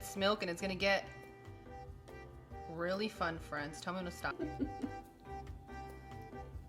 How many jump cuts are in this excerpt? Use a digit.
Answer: 1